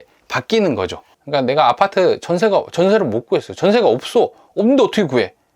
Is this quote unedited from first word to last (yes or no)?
no